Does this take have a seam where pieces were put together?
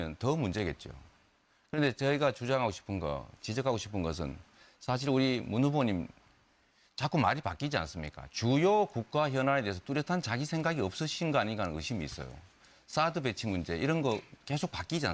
yes; 1 cut; at 10.1 s

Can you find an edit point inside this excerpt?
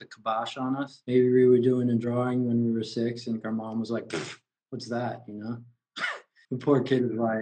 yes; 1 cut; at 6.5 s

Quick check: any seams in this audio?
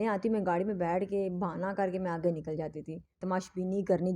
yes; 1 cut; at 3.2 s

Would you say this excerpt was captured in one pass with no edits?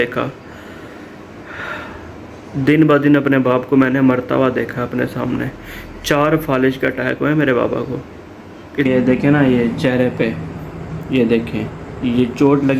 no; 1 cut; at 8.9 s

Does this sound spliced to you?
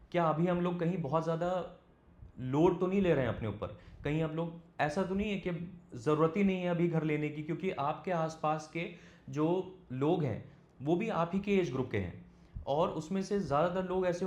no; 0 cuts

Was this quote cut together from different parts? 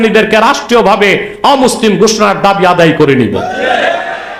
no; 0 cuts

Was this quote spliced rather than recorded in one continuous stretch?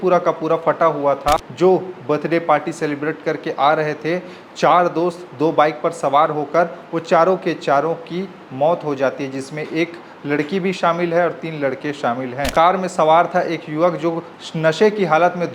yes; 2 cuts; at 1.4 s, 12.5 s

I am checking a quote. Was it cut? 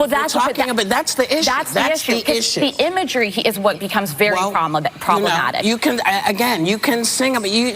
yes; 1 cut; at 1.1 s

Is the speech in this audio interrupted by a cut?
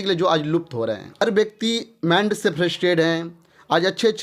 yes; 1 cut; at 1.2 s

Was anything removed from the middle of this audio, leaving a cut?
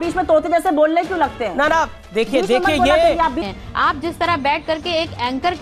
yes; 1 cut; at 3.4 s

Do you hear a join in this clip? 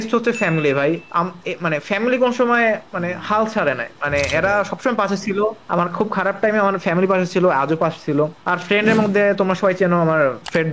no; 0 cuts

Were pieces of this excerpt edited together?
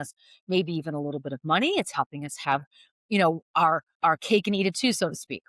yes; 1 cut; at 3.9 s

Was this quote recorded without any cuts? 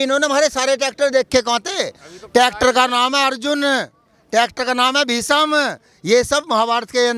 yes; 0 cuts

